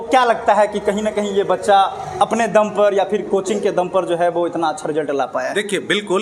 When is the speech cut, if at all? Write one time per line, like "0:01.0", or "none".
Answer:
none

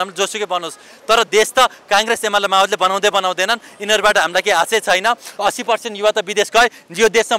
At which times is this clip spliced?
0:05.3

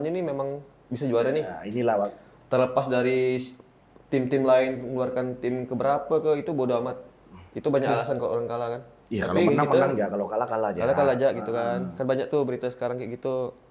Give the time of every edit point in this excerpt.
none

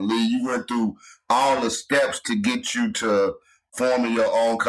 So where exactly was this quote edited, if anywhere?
0:03.7

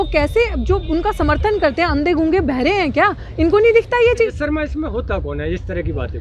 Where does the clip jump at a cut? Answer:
0:04.3

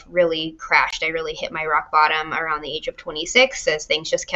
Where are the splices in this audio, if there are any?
none

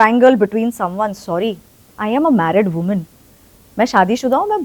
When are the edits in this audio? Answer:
none

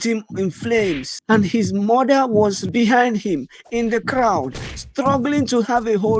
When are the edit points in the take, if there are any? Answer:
0:01.1
0:02.6

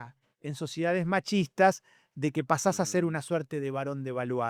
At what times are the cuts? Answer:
none

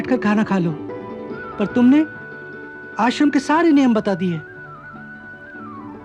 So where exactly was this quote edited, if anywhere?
none

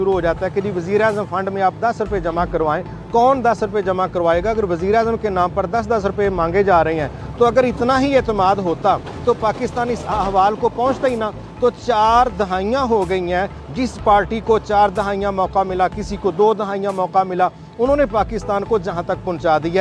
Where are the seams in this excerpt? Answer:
none

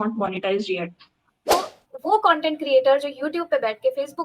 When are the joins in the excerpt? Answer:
0:01.4

